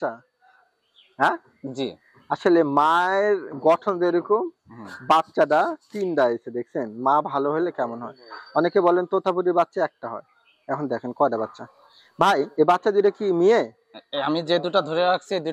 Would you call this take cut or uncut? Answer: uncut